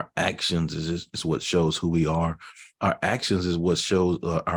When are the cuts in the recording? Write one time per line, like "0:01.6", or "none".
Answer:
none